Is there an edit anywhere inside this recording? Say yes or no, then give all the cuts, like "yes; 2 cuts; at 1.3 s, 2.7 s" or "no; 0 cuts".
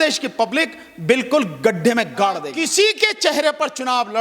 yes; 1 cut; at 2.5 s